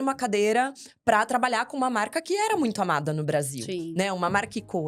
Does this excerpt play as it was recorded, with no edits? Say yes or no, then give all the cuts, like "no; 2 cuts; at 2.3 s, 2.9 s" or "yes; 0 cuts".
yes; 0 cuts